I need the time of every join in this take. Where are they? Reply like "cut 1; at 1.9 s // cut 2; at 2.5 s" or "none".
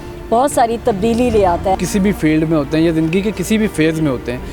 cut 1; at 1.8 s